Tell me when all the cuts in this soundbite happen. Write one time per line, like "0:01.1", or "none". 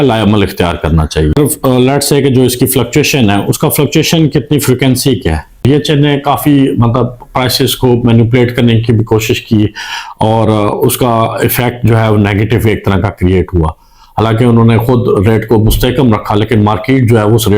0:01.4
0:05.6